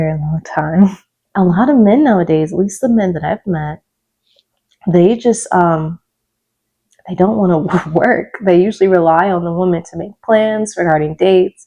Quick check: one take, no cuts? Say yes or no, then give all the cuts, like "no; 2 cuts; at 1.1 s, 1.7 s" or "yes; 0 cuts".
no; 1 cut; at 1.2 s